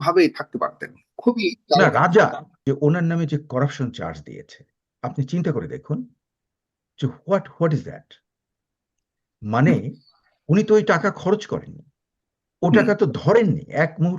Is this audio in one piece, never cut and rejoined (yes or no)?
no